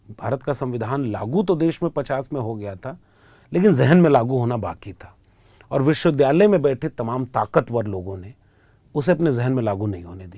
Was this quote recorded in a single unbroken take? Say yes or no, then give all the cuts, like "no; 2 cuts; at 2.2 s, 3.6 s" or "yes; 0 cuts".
yes; 0 cuts